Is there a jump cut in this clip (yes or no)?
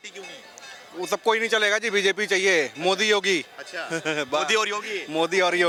no